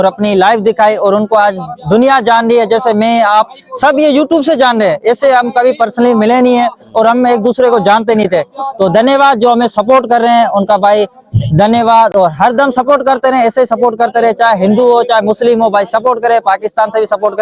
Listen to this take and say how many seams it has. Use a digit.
0